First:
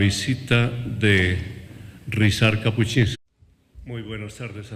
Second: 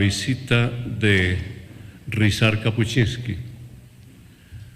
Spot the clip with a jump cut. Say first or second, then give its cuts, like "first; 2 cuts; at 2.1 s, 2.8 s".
second; 1 cut; at 3.2 s